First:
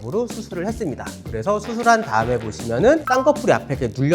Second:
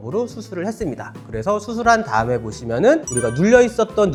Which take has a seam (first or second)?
first